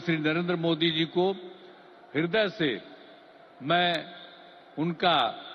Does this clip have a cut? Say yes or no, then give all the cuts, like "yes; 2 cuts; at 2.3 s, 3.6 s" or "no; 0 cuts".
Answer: no; 0 cuts